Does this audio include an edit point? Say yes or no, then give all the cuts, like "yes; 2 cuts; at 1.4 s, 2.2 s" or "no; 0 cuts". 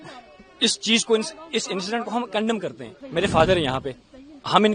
yes; 1 cut; at 2.9 s